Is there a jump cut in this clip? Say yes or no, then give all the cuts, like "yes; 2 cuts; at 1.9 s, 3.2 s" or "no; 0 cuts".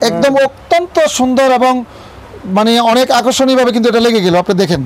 no; 0 cuts